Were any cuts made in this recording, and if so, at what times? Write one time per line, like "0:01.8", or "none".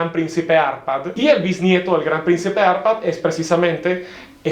0:01.1